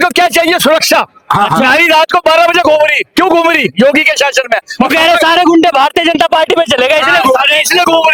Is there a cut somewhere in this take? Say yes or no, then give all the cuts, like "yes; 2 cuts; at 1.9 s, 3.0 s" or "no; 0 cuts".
no; 0 cuts